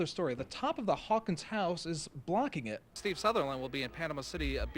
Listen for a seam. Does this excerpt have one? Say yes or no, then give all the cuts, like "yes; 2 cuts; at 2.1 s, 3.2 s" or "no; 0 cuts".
yes; 1 cut; at 3.0 s